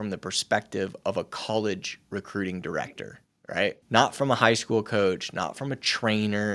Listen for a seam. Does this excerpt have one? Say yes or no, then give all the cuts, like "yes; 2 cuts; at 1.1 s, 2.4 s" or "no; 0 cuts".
yes; 1 cut; at 3.8 s